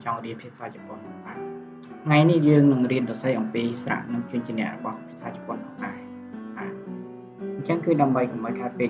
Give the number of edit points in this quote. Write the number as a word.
two